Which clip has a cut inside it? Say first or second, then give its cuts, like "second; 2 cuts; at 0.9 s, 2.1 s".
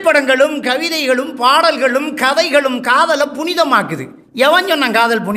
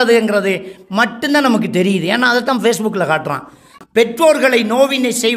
second; 1 cut; at 3.8 s